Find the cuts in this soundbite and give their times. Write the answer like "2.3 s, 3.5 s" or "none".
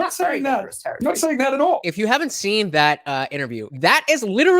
1.9 s, 3.7 s